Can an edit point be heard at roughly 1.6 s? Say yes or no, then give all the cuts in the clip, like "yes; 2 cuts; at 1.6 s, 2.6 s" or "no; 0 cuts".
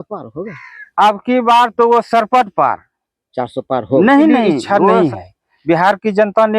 no; 1 cut; at 4.8 s